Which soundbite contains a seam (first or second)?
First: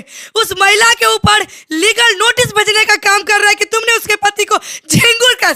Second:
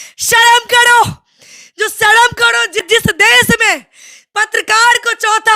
second